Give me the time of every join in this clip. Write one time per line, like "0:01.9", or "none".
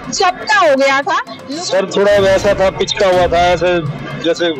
0:01.3